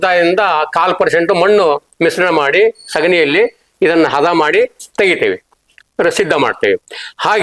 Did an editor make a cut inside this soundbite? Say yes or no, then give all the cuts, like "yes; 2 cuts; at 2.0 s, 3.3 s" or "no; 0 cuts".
no; 0 cuts